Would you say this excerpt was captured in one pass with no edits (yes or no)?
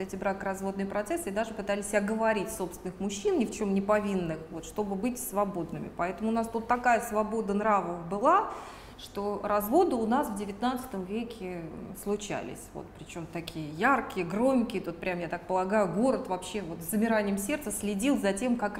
yes